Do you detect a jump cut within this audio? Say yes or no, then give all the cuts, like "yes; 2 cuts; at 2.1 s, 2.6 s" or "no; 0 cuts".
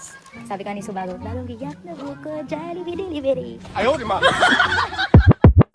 no; 0 cuts